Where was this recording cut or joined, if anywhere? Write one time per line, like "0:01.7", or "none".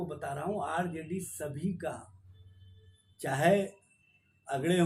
none